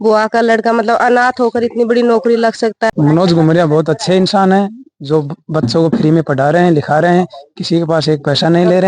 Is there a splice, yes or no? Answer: yes